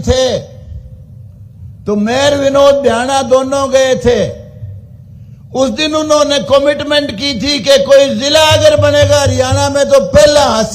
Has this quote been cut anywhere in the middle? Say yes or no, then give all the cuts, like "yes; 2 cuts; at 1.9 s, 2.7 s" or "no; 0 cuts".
no; 0 cuts